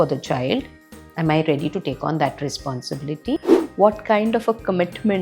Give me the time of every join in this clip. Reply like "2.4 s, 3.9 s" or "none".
3.6 s